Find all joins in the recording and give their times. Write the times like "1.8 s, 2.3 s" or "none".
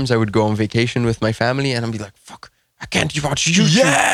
none